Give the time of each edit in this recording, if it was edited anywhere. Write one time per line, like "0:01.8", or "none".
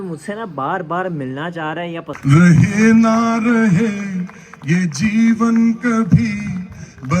0:02.1